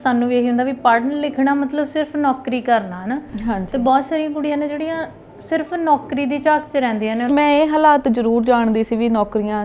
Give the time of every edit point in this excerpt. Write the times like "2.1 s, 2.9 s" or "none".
7.3 s